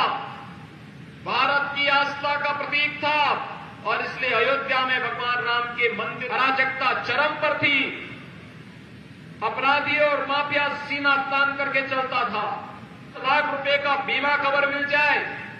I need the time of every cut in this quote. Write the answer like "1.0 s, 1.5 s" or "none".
6.2 s, 13.2 s